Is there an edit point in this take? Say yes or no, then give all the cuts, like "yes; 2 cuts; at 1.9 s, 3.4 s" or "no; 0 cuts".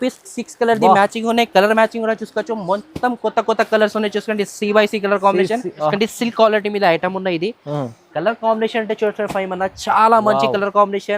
yes; 1 cut; at 5.9 s